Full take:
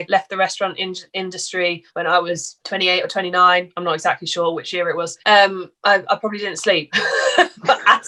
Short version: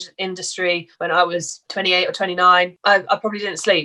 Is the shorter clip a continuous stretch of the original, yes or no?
no